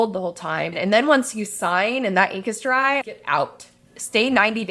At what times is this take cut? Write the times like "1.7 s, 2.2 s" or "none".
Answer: 0.7 s, 3.0 s